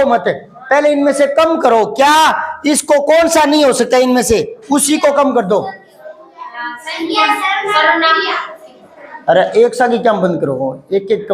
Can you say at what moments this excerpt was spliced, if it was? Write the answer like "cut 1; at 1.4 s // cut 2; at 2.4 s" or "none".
none